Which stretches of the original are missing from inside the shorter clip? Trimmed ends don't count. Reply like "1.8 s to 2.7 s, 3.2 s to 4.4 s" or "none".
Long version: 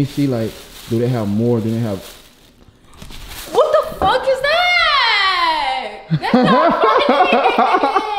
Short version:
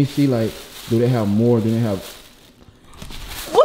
none